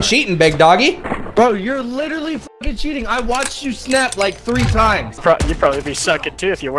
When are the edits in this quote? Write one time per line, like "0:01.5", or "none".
0:05.2